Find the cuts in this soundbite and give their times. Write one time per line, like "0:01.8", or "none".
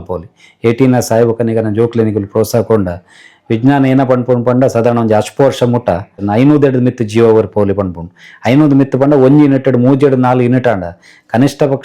0:06.2

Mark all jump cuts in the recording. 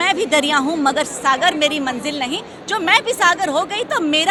none

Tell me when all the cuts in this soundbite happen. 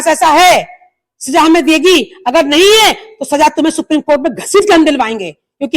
none

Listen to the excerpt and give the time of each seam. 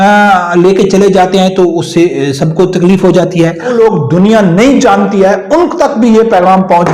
0:03.7

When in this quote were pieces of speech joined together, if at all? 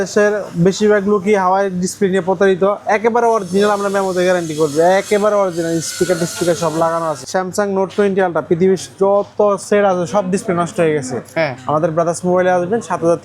0:07.2

